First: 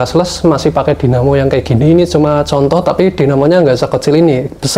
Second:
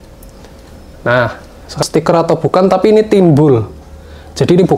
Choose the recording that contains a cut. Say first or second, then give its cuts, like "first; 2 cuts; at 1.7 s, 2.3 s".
second; 1 cut; at 1.8 s